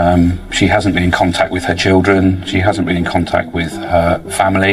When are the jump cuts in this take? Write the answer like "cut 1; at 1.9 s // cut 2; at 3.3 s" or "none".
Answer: none